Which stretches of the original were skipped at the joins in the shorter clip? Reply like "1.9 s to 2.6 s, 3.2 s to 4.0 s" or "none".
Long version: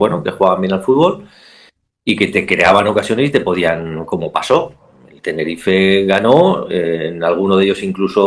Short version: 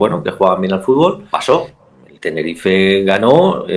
1.3 s to 4.3 s